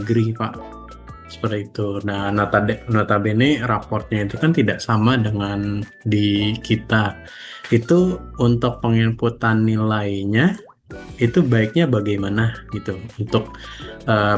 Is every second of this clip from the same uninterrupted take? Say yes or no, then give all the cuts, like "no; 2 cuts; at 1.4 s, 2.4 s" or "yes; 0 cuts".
yes; 0 cuts